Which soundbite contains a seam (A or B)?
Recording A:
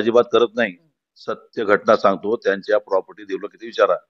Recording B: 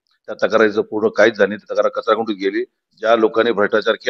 B